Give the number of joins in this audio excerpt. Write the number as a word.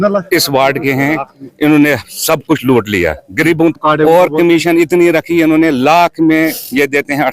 one